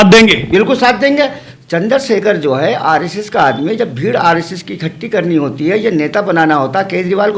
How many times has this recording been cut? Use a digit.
1